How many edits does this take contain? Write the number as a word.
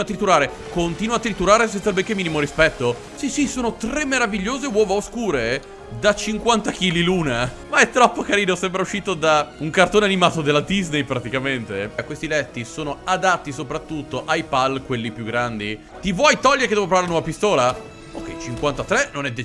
four